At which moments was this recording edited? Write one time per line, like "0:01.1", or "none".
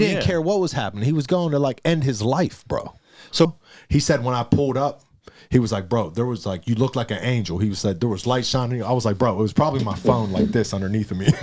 0:03.5